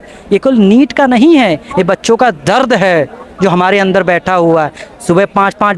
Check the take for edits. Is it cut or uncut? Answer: uncut